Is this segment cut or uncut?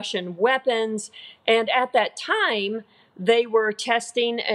uncut